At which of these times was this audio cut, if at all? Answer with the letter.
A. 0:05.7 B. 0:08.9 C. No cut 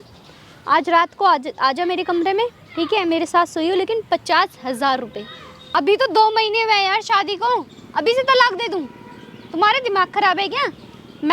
A